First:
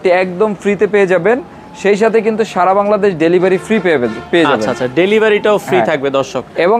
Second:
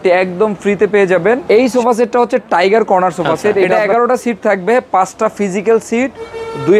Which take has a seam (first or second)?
second